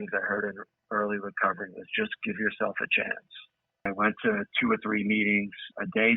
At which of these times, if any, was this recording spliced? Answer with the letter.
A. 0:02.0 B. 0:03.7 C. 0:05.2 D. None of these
B